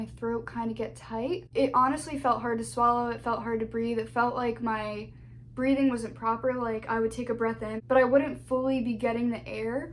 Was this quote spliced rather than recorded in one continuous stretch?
no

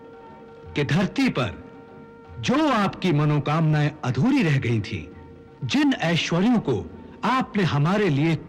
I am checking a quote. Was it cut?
no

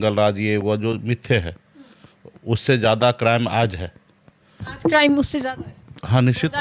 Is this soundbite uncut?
yes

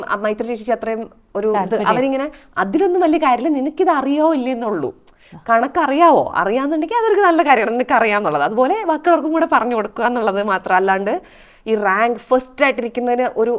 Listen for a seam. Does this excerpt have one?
no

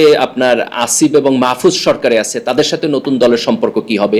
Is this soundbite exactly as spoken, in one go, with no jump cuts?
yes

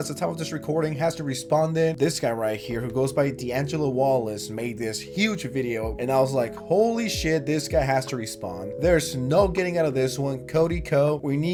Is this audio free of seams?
yes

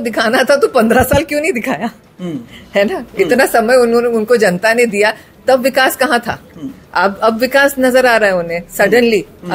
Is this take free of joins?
yes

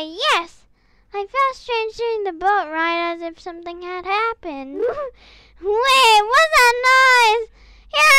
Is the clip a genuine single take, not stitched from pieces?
no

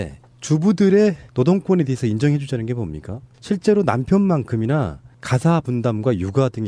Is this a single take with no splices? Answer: no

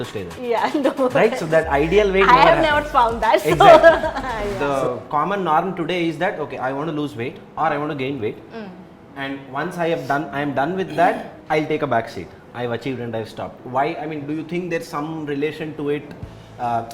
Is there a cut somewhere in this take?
yes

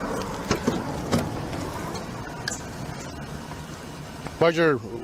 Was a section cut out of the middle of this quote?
no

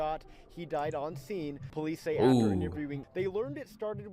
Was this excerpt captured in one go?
no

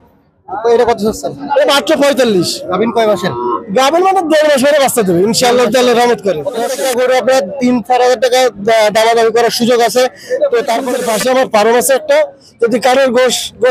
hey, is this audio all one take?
no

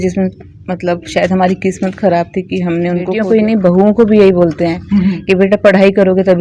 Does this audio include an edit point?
yes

